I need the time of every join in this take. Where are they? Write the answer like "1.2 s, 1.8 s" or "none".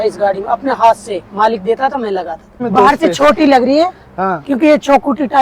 2.6 s